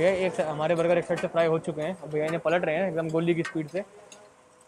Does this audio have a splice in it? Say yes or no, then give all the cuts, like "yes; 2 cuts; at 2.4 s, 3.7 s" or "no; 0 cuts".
no; 0 cuts